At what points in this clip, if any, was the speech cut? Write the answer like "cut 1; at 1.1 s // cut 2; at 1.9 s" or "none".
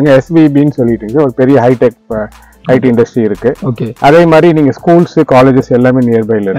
none